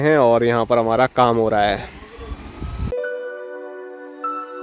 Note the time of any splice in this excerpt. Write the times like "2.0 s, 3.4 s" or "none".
none